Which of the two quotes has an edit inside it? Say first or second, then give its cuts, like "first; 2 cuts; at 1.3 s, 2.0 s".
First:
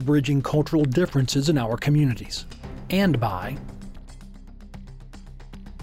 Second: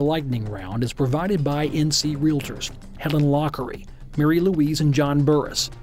first; 1 cut; at 3.6 s